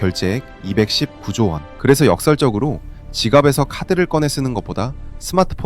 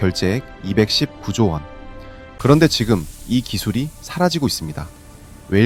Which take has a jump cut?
first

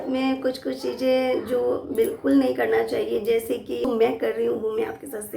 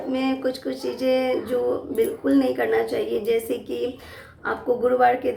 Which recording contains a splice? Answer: first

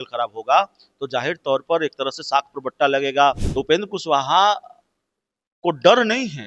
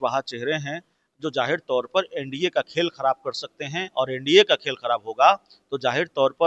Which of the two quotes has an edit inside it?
first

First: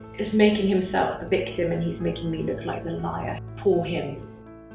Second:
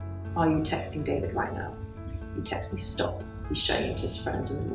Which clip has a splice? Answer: first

